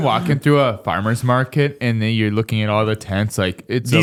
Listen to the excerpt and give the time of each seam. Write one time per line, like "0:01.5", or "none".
none

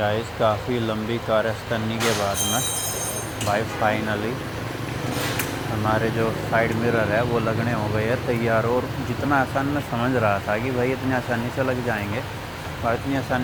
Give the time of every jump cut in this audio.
none

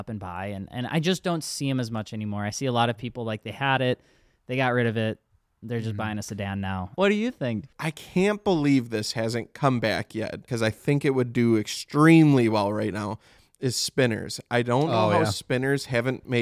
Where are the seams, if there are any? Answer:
0:06.9
0:07.7
0:10.5

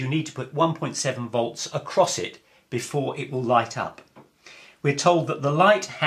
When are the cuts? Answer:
none

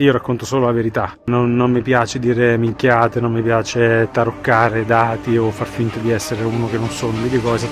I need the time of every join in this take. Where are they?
0:01.2

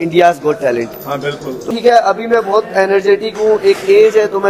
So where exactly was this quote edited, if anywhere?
0:01.5

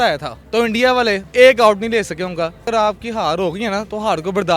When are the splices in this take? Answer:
0:02.6

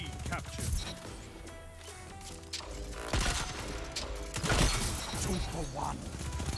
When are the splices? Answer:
none

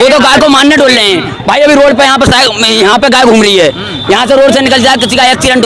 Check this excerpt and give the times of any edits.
none

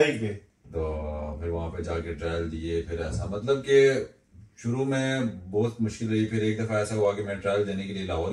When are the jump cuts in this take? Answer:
none

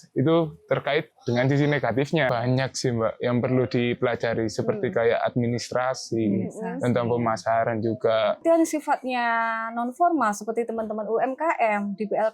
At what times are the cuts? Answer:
0:02.3
0:08.4

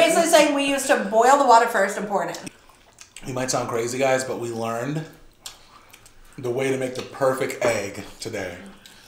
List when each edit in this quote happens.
0:02.4

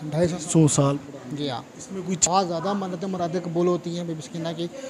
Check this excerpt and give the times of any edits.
0:02.2

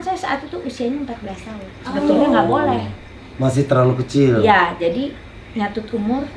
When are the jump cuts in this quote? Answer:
none

